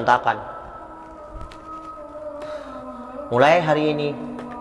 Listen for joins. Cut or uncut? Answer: uncut